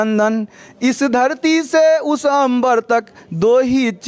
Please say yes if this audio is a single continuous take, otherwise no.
yes